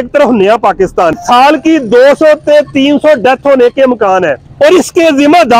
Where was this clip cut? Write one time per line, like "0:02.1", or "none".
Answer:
0:01.1
0:04.4